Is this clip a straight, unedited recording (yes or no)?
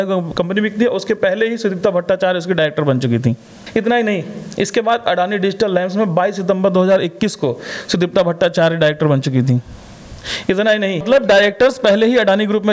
no